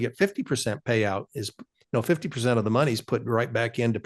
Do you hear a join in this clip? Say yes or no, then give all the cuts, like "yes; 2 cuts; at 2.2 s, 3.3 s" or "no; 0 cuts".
no; 0 cuts